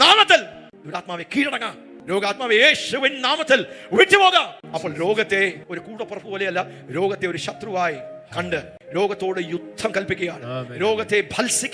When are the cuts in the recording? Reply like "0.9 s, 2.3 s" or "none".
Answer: none

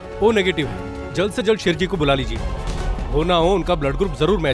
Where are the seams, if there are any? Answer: 1.1 s

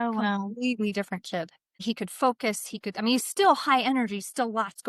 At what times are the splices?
1.7 s

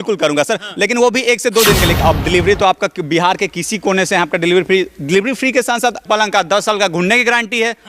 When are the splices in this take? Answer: 2.0 s, 6.0 s

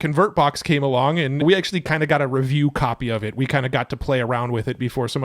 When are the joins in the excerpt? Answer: 1.4 s

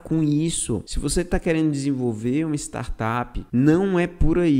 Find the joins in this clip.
0.9 s, 3.4 s

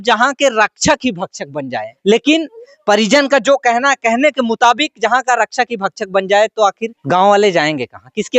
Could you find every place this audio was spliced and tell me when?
1.9 s, 6.9 s

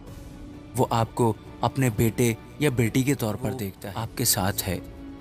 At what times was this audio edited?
3.8 s

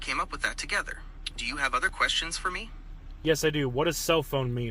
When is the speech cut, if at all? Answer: none

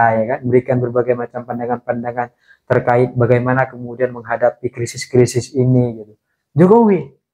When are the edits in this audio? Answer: none

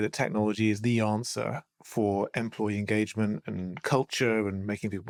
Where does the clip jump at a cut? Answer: none

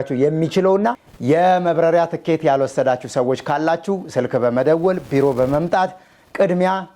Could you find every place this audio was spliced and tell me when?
1.1 s

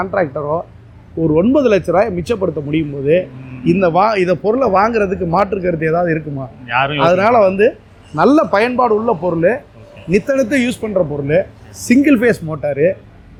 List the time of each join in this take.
none

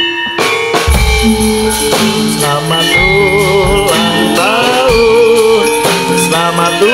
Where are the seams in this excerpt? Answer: none

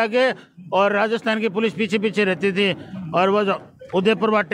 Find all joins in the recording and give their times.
none

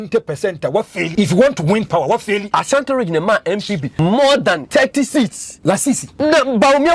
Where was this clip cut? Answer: 1.1 s, 2.4 s, 3.9 s, 4.6 s, 5.8 s

